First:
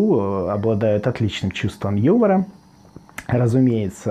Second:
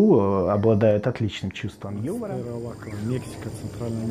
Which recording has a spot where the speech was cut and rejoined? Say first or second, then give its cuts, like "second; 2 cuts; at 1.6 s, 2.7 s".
second; 1 cut; at 2.4 s